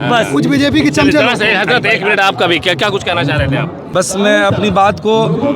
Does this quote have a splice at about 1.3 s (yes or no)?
no